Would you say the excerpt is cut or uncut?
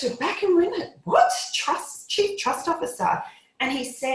uncut